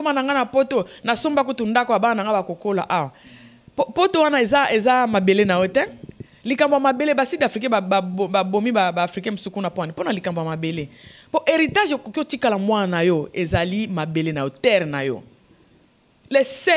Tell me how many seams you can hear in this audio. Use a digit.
0